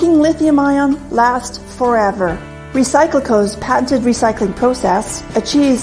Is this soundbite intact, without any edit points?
no; 1 cut; at 1.5 s

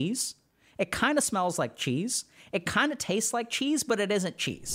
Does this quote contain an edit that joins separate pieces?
no; 0 cuts

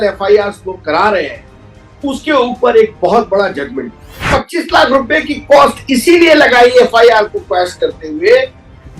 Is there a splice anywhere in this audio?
yes; 1 cut; at 4.2 s

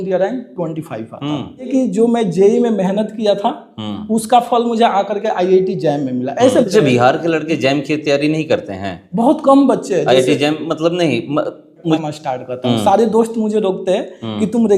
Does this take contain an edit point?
yes; 3 cuts; at 1.7 s, 6.7 s, 12.0 s

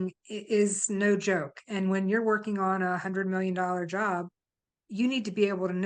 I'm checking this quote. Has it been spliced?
no; 0 cuts

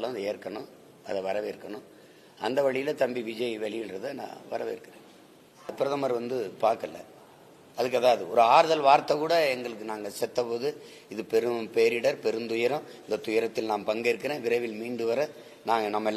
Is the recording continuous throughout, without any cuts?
no; 1 cut; at 5.7 s

